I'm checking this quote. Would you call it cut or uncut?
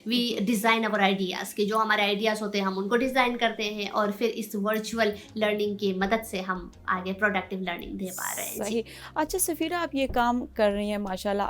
uncut